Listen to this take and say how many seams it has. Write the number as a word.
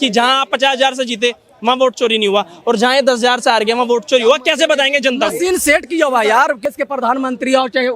one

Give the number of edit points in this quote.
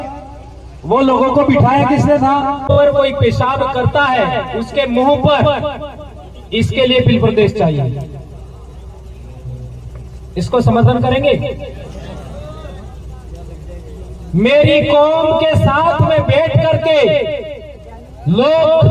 one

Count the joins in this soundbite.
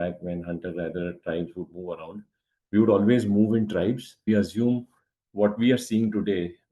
one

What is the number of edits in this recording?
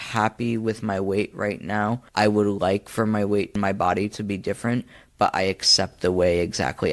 two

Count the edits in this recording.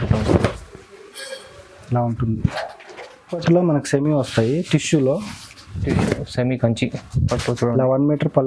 one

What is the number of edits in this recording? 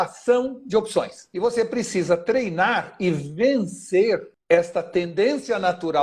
two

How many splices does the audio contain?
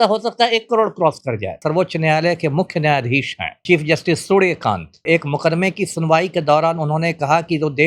three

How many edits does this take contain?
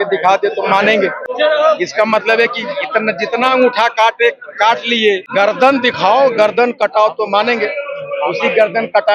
two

